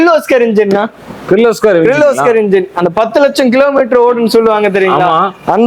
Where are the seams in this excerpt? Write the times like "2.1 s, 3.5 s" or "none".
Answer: none